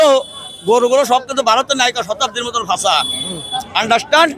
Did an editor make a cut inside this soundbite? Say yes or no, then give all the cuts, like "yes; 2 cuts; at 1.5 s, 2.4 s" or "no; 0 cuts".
no; 0 cuts